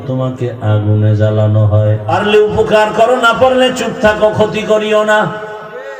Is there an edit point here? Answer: yes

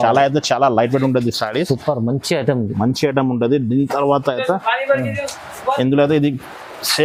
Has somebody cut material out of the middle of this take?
no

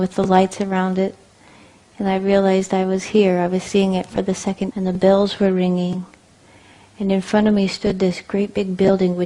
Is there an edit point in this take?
no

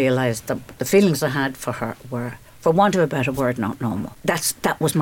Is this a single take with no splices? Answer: no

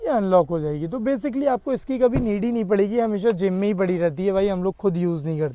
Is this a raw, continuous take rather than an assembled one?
yes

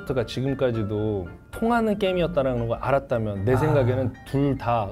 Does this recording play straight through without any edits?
yes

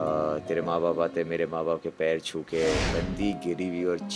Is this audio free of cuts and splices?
no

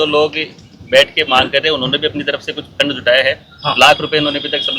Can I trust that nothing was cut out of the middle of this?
yes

